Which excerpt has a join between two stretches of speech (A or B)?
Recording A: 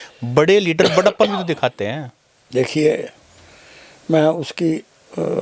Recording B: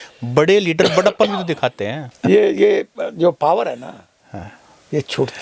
B